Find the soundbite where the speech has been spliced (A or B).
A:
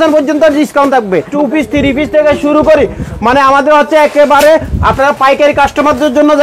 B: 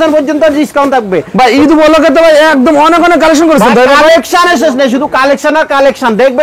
A